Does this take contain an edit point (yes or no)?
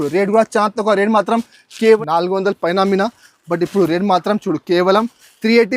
yes